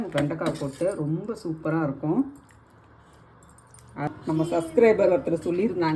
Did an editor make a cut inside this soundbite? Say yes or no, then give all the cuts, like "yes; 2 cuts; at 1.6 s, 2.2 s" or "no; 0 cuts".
yes; 1 cut; at 4.1 s